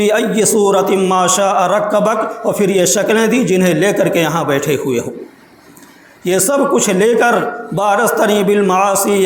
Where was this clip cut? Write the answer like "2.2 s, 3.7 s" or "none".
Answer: none